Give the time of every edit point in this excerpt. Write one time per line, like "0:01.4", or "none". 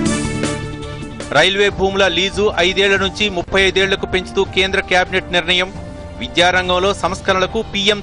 0:01.0